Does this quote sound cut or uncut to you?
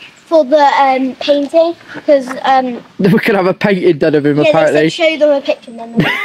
uncut